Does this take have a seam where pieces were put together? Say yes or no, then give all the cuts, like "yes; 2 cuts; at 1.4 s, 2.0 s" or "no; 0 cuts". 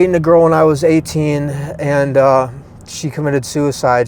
no; 0 cuts